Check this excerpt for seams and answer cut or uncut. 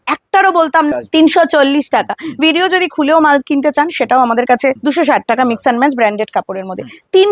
cut